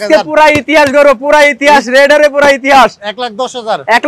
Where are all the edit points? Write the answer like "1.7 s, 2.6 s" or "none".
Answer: none